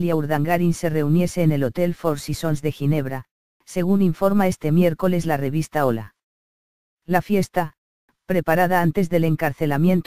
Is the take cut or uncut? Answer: cut